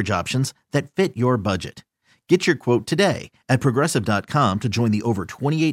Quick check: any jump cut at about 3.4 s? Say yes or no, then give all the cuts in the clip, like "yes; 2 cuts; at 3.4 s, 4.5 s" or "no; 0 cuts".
no; 0 cuts